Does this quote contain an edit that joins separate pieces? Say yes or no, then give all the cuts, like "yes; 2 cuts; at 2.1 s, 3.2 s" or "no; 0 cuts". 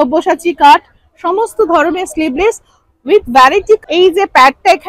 yes; 1 cut; at 3.8 s